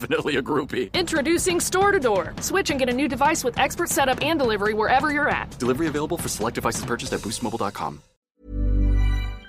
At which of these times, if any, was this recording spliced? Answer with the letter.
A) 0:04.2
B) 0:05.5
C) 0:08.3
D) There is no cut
C